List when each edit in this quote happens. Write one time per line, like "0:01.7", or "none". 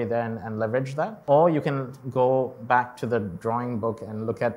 0:01.2

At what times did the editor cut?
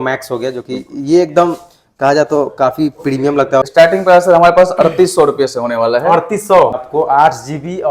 0:03.6
0:06.8

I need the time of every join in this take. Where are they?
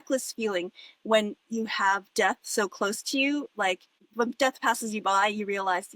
0:03.9

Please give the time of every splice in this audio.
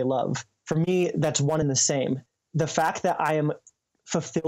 0:02.0

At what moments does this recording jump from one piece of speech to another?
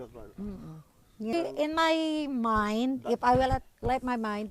0:01.3

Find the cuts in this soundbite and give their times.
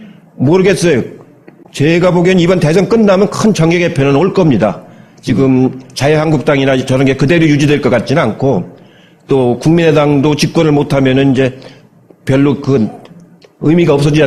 none

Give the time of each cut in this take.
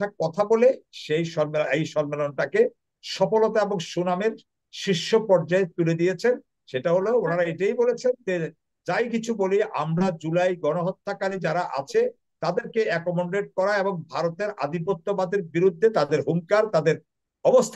none

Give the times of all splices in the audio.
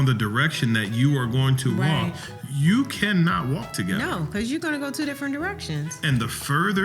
0:05.9

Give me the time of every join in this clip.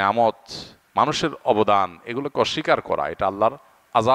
none

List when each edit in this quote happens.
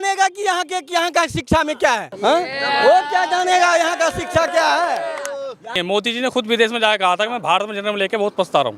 0:02.1
0:05.7

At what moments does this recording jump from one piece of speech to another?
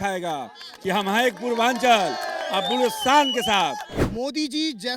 0:03.9

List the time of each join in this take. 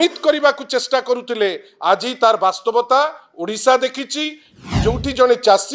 0:04.7

